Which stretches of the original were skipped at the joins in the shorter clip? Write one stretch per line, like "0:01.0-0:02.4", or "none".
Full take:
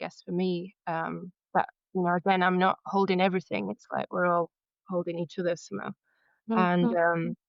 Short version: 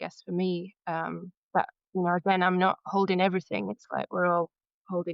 none